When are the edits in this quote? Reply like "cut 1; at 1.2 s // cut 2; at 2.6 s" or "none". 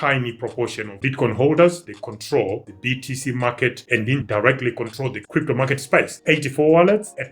cut 1; at 6.2 s